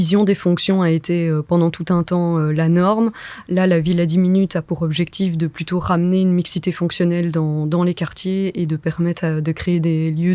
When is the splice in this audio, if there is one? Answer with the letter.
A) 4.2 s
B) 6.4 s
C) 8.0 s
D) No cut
D